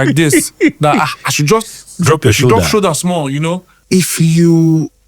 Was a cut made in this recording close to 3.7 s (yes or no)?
yes